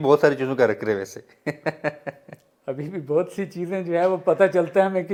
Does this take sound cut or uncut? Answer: uncut